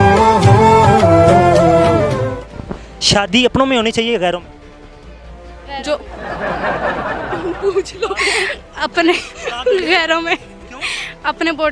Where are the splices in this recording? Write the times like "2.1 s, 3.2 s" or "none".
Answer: none